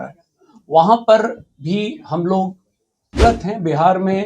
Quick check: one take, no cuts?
no; 1 cut; at 3.2 s

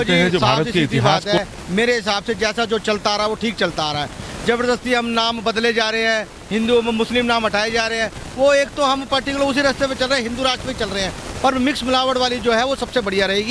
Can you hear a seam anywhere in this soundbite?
yes; 1 cut; at 1.4 s

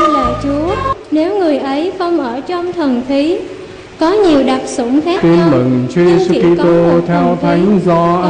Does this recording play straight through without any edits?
no; 1 cut; at 5.2 s

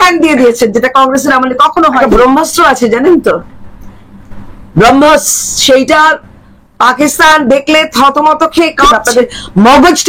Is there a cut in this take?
yes; 2 cuts; at 2.0 s, 9.0 s

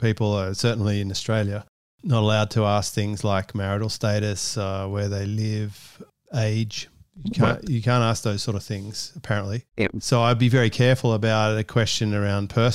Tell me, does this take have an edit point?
no; 0 cuts

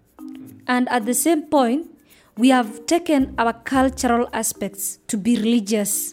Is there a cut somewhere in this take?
no; 0 cuts

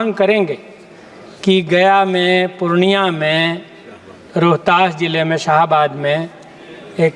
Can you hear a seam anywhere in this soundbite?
no; 0 cuts

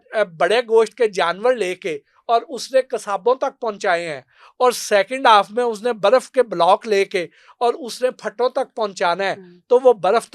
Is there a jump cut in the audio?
no; 0 cuts

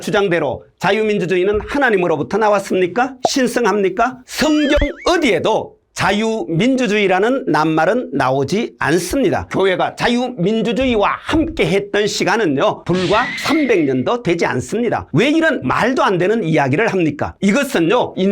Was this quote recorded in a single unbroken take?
no; 3 cuts; at 9.5 s, 15.1 s, 17.3 s

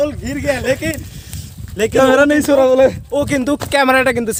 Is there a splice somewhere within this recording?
no; 0 cuts

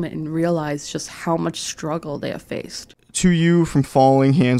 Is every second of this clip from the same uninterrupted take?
no; 1 cut; at 2.7 s

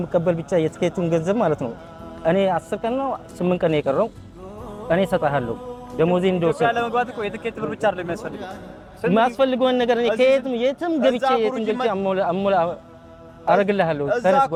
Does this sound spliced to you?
no; 0 cuts

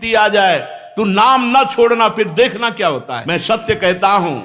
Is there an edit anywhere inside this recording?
yes; 1 cut; at 3.1 s

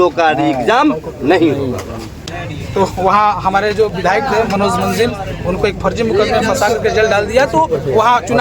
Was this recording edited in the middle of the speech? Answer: yes; 1 cut; at 2.3 s

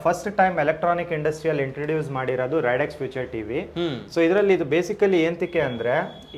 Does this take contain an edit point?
no; 0 cuts

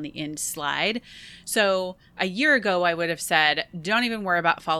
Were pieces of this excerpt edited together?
no; 0 cuts

